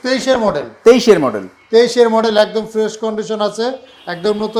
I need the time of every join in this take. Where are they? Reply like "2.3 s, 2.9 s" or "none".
none